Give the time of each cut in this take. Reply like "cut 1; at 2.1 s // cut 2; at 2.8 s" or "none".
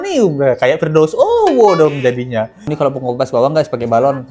cut 1; at 2.7 s